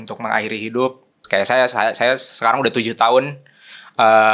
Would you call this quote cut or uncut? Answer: cut